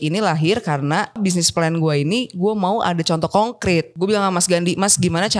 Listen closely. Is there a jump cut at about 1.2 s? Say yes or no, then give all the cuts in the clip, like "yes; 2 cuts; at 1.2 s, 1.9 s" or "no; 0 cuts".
yes; 2 cuts; at 1.2 s, 3.9 s